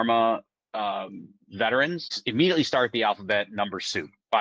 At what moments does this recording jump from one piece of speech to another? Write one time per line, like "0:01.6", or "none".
0:02.2